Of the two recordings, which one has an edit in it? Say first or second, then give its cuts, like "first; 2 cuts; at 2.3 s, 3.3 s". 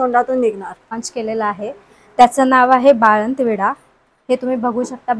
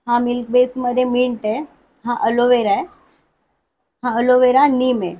first; 1 cut; at 1.1 s